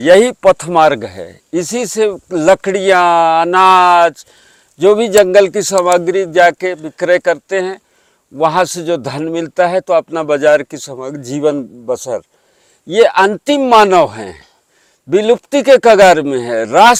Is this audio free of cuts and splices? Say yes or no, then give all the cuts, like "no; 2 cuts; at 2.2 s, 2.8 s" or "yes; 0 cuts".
yes; 0 cuts